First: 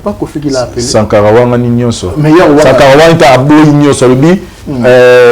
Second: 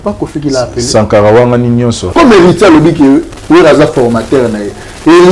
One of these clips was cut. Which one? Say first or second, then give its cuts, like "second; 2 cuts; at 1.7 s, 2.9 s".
second; 1 cut; at 2.0 s